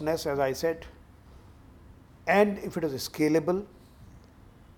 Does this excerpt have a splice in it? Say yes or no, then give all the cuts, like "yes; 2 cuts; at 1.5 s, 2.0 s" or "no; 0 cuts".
no; 0 cuts